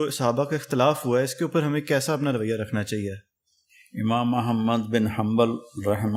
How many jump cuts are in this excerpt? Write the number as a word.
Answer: zero